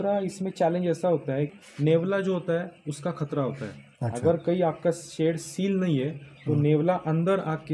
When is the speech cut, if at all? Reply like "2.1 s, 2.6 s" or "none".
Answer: 1.5 s